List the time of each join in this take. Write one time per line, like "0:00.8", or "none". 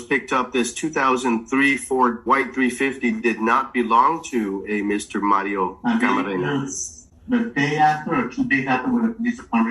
0:02.2
0:05.8